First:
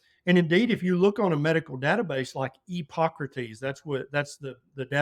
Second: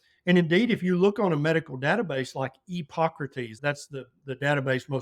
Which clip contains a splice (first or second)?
second